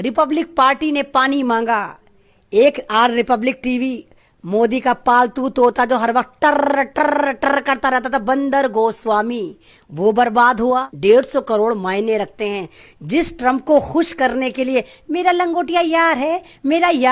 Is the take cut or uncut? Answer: cut